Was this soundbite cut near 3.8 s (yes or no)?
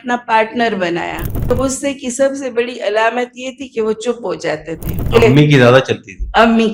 no